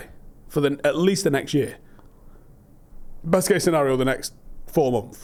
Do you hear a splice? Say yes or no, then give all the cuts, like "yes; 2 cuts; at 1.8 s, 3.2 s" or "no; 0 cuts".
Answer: no; 0 cuts